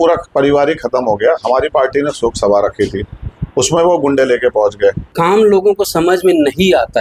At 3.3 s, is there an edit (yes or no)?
no